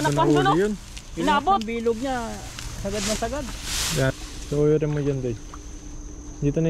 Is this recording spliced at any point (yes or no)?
yes